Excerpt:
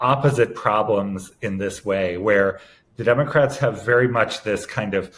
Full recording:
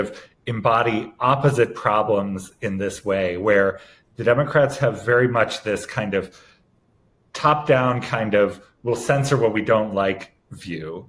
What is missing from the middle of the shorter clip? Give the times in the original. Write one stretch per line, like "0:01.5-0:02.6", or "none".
none